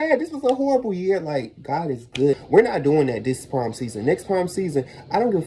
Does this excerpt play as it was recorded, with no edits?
no; 1 cut; at 2.4 s

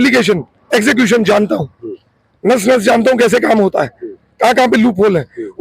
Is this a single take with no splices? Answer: yes; 0 cuts

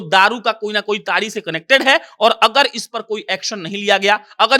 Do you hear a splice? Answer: no; 0 cuts

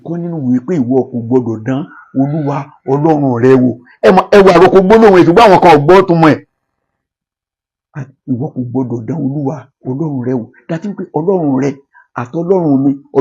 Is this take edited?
no; 0 cuts

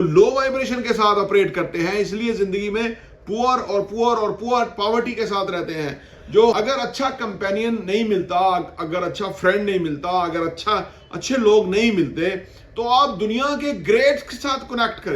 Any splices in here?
yes; 1 cut; at 6.5 s

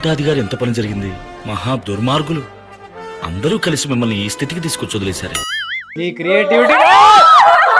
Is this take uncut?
no; 1 cut; at 5.9 s

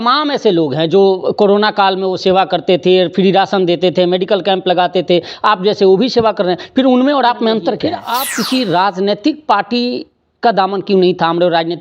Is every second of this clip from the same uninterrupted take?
no; 1 cut; at 7.9 s

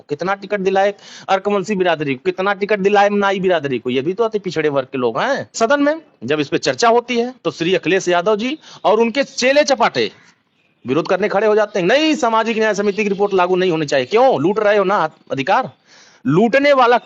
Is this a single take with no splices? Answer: no; 1 cut; at 5.5 s

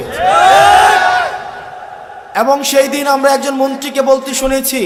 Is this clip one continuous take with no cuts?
yes; 0 cuts

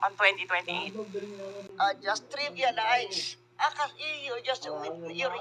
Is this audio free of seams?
no; 1 cut; at 1.7 s

